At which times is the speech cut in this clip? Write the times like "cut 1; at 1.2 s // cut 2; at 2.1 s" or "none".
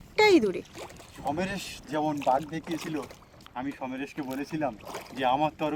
none